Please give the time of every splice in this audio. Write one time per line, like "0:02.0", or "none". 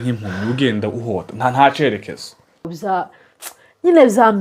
0:02.7